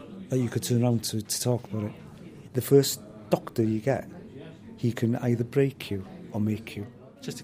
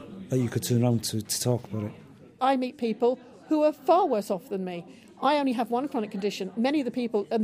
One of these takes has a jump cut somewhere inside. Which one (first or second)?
second